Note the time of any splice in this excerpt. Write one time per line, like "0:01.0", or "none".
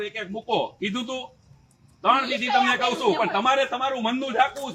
none